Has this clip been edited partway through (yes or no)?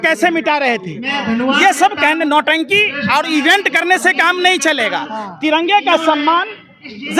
no